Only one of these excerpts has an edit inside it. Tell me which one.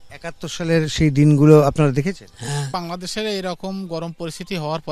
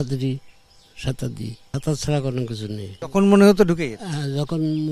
first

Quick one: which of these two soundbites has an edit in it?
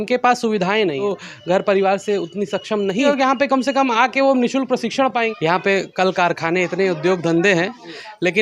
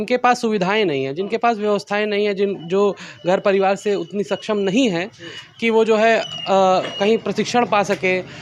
first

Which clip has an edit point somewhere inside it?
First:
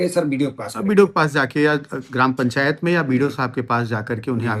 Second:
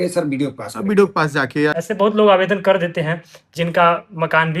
second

